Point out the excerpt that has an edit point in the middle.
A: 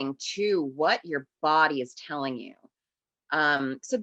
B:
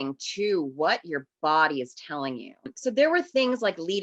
B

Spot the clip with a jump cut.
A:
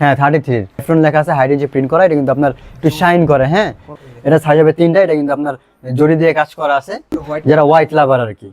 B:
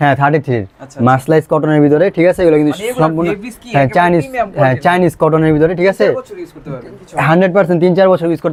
A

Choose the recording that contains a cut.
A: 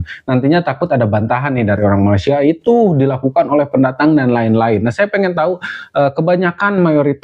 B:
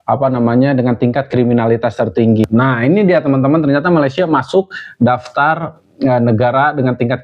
B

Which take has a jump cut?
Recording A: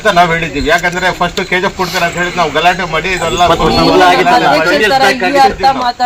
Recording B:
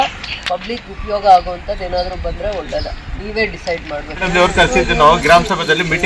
B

